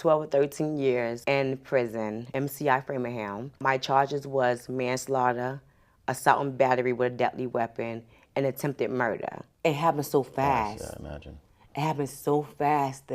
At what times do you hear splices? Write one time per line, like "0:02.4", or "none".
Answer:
0:01.2
0:02.3
0:03.4
0:09.4